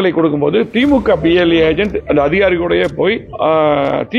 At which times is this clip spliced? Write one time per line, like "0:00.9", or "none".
0:02.0
0:03.3

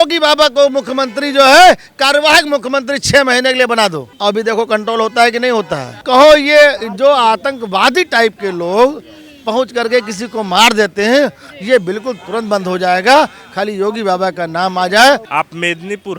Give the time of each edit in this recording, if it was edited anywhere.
0:04.1
0:15.3

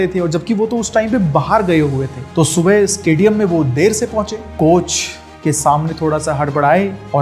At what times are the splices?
none

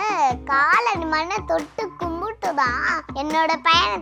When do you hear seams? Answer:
0:03.0

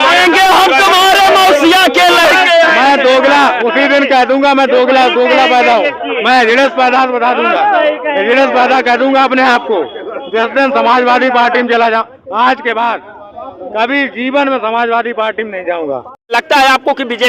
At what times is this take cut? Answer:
0:16.3

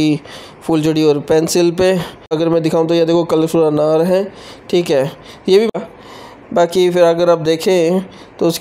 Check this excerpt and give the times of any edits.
0:02.3
0:05.7

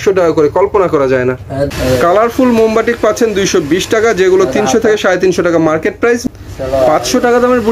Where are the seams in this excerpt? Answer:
0:01.7
0:06.2

